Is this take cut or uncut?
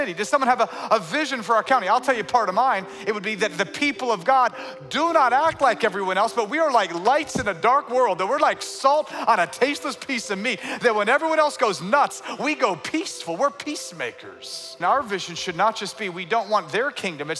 cut